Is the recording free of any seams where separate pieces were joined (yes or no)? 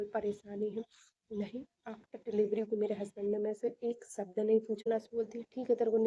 no